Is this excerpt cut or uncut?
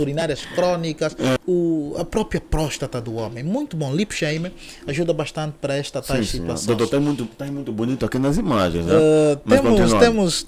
cut